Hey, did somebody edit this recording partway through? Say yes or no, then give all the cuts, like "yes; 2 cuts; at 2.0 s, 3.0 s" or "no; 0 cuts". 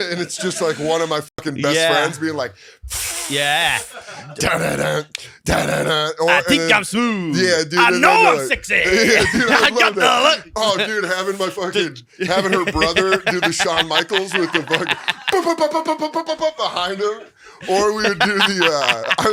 no; 0 cuts